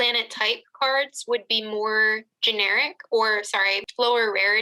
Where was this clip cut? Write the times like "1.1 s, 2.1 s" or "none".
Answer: none